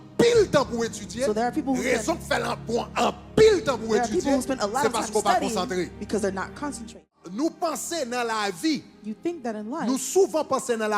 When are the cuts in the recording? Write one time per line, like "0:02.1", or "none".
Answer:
0:07.2